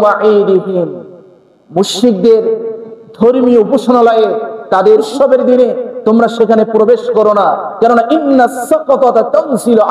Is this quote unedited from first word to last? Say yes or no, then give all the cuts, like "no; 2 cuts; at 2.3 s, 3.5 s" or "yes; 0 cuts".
no; 1 cut; at 5.1 s